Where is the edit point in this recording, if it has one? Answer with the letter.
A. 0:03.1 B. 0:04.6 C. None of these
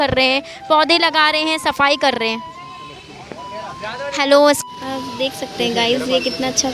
B